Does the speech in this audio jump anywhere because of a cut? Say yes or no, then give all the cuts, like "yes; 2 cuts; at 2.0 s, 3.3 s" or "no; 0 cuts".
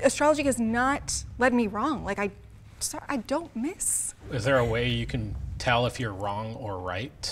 no; 0 cuts